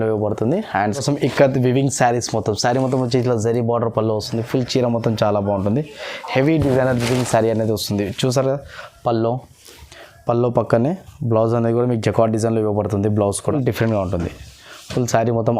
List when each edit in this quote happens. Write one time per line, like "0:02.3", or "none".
0:01.0
0:13.5